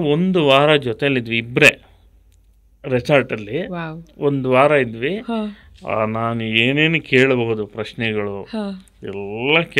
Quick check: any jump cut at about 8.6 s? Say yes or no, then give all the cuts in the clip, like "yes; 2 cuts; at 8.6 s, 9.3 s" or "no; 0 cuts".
no; 0 cuts